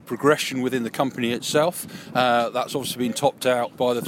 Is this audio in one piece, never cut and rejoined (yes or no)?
yes